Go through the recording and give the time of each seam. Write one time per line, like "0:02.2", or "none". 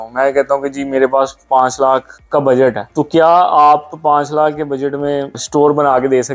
0:02.2
0:02.8
0:05.4

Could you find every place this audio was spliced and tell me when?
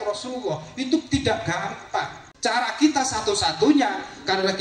0:02.2

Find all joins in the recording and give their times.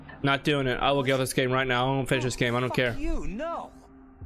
none

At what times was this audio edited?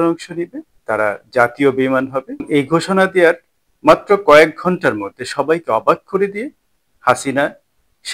0:02.4

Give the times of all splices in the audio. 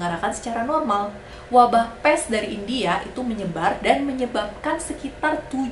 0:01.3

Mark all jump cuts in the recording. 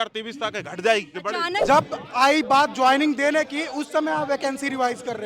0:01.6

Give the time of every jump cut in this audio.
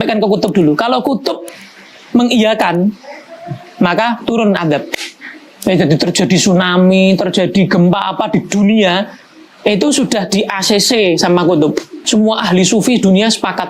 0:11.9

